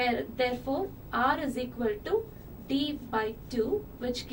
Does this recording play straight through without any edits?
no; 1 cut; at 1.0 s

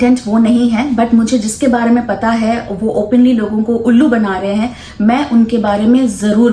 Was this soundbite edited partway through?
no; 0 cuts

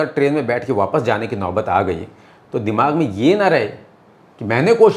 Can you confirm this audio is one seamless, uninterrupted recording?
yes; 0 cuts

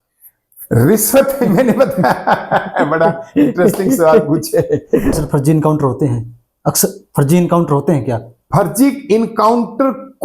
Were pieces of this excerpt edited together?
yes; 1 cut; at 5.2 s

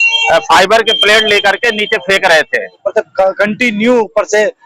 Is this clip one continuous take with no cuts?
no; 1 cut; at 2.8 s

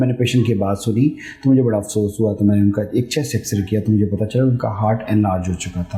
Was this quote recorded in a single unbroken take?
yes; 0 cuts

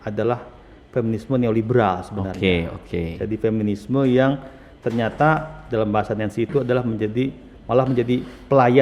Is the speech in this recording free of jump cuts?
yes; 0 cuts

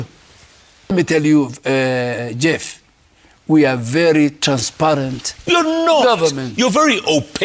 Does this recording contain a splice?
yes; 1 cut; at 0.9 s

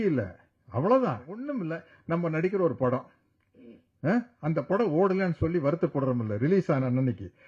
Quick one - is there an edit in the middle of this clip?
yes; 1 cut; at 1.5 s

